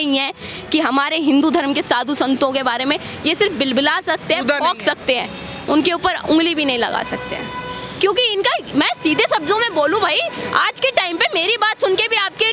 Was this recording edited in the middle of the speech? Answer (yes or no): no